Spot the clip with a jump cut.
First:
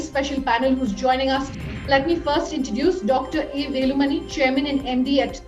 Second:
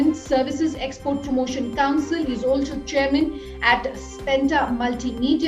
first; 1 cut; at 1.6 s

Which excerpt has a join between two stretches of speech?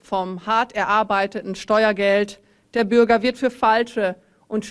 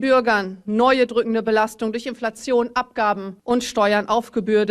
second; 1 cut; at 3.3 s

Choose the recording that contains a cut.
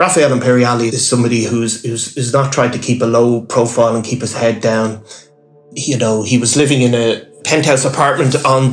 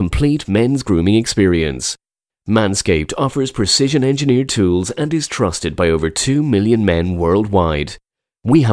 first; 2 cuts; at 1.0 s, 5.6 s

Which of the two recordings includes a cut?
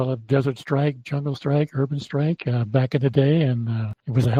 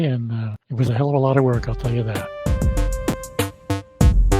second; 1 cut; at 2.2 s

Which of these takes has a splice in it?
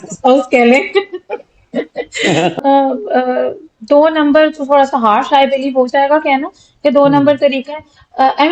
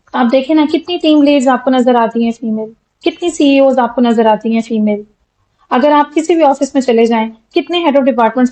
first; 1 cut; at 2.5 s

